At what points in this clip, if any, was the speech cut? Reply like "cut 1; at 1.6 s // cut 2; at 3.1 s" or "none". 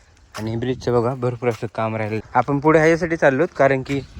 cut 1; at 2.2 s